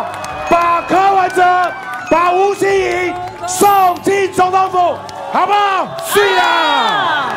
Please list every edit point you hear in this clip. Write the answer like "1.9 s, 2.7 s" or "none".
none